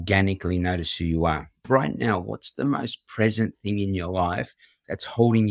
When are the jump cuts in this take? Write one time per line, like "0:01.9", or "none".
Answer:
0:01.5